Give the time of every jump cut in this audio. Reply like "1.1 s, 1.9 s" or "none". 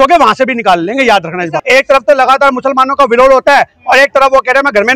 1.6 s